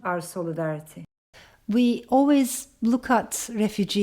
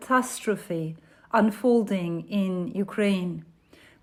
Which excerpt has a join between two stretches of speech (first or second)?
first